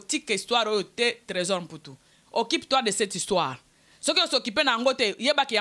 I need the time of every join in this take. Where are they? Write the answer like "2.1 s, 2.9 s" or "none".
none